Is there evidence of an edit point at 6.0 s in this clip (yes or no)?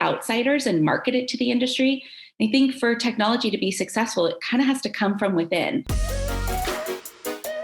yes